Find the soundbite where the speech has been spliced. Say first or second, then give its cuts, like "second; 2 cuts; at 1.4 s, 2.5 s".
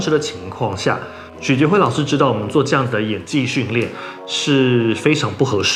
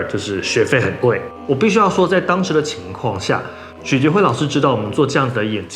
second; 1 cut; at 1.2 s